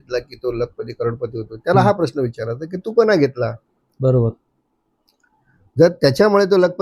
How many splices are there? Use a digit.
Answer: 0